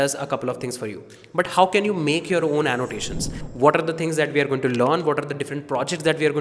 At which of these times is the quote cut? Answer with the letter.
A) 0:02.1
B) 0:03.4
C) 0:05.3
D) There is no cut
B